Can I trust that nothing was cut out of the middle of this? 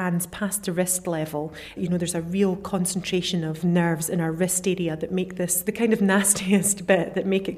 no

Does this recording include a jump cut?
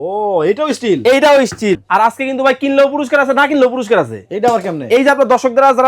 yes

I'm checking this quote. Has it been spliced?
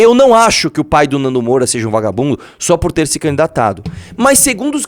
no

